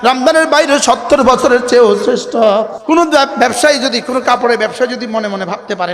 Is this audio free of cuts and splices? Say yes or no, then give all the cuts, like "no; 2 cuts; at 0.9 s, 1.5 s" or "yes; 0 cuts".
no; 1 cut; at 2.8 s